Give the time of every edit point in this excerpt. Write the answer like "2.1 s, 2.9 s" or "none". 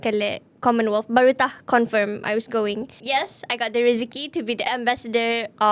2.9 s, 4.7 s